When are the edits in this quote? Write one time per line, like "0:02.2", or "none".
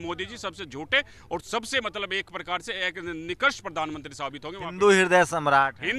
none